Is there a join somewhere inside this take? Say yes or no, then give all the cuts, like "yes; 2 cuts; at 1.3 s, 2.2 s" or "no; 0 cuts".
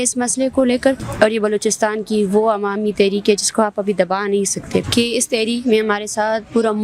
yes; 2 cuts; at 1.1 s, 4.9 s